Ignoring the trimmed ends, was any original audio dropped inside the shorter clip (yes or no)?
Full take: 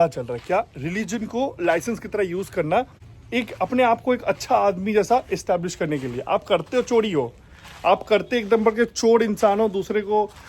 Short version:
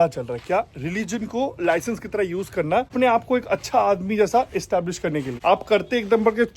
yes